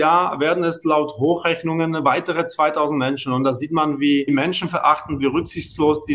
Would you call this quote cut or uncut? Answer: cut